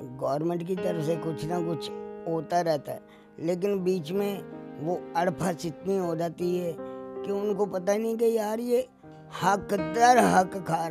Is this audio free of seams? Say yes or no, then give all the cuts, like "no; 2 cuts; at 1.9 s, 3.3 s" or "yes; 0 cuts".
yes; 0 cuts